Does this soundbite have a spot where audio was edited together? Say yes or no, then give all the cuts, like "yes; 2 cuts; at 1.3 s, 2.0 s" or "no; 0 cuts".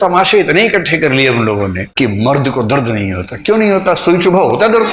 no; 0 cuts